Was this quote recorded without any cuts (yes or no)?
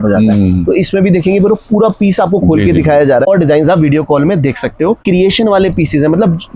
no